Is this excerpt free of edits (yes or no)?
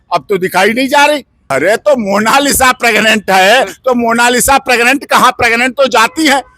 no